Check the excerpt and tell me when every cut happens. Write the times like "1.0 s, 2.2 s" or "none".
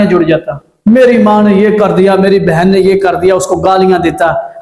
none